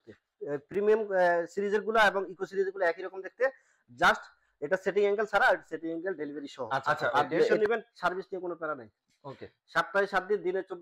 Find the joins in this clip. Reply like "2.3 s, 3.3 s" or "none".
7.6 s